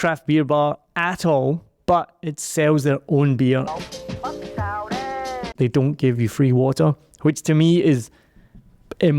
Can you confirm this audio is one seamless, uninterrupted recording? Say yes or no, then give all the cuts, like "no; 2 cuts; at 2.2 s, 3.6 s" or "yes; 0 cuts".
no; 2 cuts; at 3.7 s, 5.5 s